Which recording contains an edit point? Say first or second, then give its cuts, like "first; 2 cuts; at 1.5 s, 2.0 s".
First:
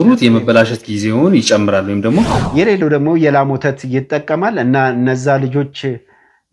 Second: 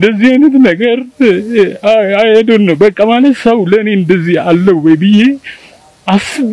first; 1 cut; at 2.4 s